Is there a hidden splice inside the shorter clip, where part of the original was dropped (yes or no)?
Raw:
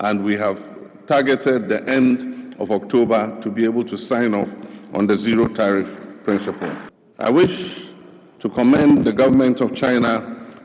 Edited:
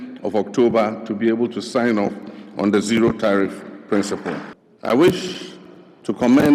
no